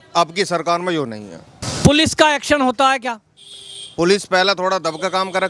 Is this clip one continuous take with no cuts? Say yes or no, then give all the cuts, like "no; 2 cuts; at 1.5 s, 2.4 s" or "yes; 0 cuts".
yes; 0 cuts